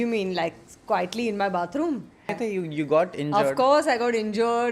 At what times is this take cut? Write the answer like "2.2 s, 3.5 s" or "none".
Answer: 2.3 s